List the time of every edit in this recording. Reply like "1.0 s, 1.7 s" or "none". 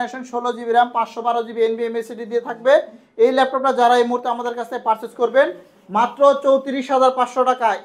none